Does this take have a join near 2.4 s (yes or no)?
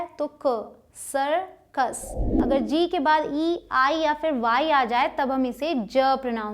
yes